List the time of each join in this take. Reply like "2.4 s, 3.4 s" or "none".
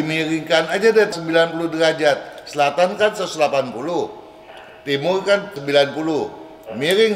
1.2 s, 5.6 s